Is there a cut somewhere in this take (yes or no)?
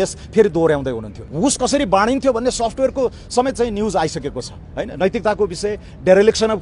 yes